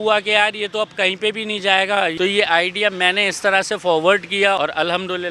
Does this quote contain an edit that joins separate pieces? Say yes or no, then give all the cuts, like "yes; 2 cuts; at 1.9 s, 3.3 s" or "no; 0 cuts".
yes; 2 cuts; at 1.9 s, 4.6 s